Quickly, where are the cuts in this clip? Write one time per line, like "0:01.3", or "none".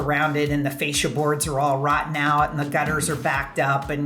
none